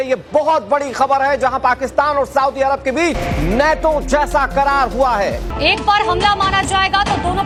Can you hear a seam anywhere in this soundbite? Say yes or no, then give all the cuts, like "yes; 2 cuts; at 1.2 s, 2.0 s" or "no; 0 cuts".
no; 0 cuts